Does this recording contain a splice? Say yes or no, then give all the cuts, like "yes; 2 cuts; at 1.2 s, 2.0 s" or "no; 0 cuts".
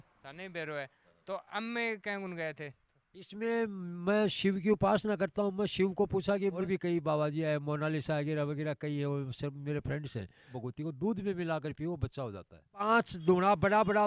yes; 3 cuts; at 6.6 s, 10.5 s, 12.8 s